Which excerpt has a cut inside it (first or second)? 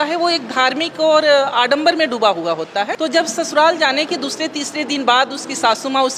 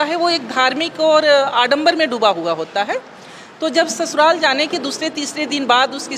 first